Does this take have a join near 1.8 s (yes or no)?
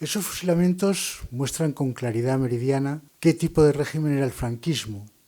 no